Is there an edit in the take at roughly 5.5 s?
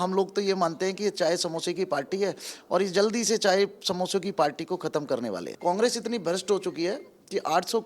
yes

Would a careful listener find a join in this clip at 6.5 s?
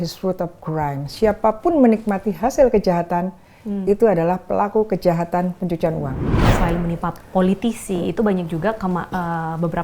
yes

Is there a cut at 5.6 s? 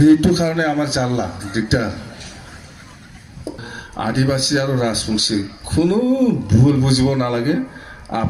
no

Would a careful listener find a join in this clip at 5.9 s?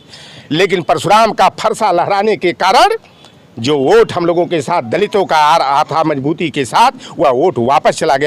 no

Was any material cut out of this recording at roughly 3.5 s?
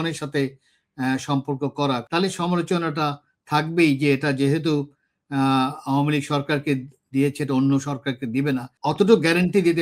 no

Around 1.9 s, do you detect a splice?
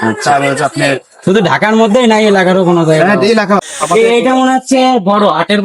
no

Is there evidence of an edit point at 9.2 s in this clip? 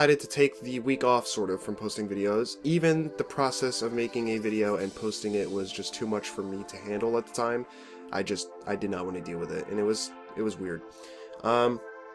yes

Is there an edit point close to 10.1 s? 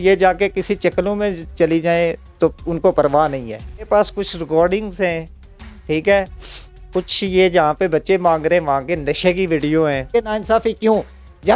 yes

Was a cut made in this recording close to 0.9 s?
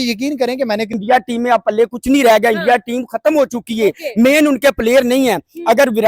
yes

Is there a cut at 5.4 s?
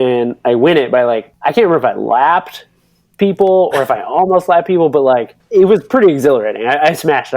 yes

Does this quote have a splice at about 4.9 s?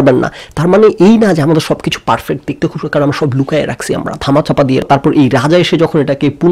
yes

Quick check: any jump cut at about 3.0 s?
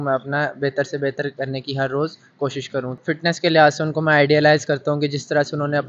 yes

